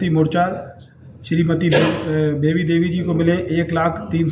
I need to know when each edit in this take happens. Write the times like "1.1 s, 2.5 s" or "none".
none